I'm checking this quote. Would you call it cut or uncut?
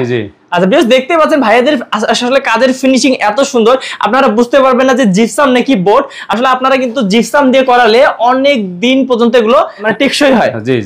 uncut